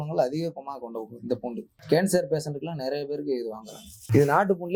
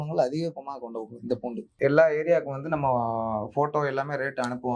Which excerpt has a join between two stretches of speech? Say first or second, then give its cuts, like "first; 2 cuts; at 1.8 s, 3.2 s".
second; 1 cut; at 1.7 s